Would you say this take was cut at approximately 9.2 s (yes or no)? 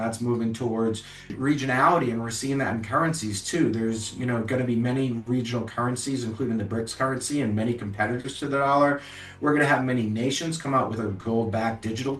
no